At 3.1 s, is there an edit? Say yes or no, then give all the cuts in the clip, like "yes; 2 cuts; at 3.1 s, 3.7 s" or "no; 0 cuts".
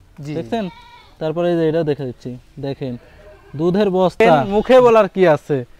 no; 1 cut; at 4.4 s